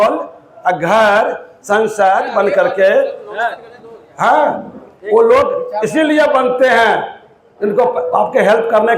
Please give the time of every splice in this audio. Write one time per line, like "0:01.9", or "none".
none